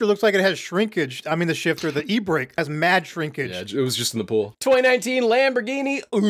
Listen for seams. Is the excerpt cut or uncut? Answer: cut